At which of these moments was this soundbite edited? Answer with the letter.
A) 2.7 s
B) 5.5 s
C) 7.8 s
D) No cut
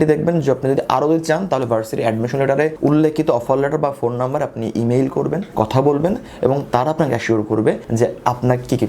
C